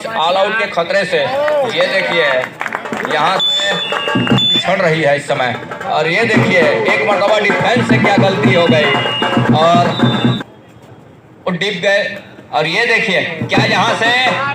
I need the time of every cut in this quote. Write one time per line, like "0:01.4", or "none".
0:04.5
0:10.4